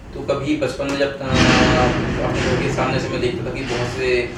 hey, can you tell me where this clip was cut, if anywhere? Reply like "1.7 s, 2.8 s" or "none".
none